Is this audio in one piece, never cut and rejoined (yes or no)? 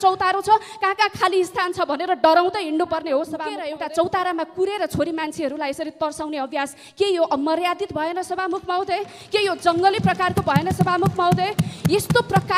no